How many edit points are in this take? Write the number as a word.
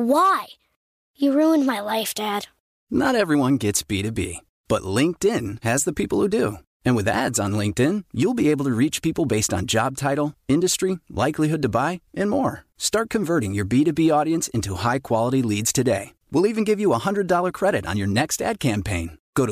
zero